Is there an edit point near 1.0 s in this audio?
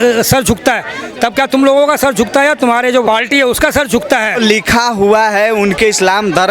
no; 2 cuts; at 3.0 s, 4.4 s

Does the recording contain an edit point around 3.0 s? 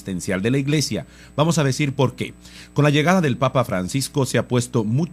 no; 0 cuts

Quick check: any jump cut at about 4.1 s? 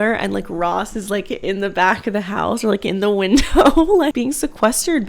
yes; 1 cut; at 4.1 s

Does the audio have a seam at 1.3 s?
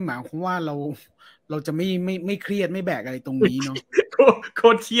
no; 0 cuts

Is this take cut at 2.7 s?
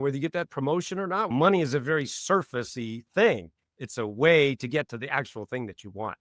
no; 1 cut; at 1.3 s

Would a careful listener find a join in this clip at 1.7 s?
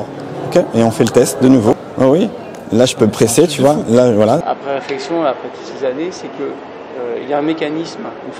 yes; 2 cuts; at 1.7 s, 4.4 s

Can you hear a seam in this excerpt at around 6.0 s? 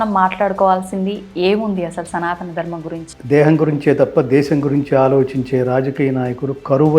no; 1 cut; at 3.1 s

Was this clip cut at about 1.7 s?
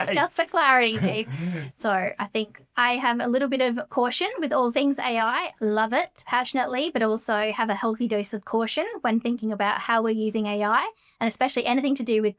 yes; 1 cut; at 1.7 s

